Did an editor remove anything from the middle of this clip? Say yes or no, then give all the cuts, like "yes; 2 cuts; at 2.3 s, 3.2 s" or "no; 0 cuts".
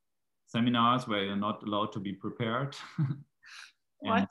no; 0 cuts